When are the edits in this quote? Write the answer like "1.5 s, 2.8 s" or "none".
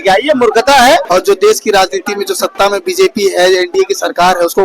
1.0 s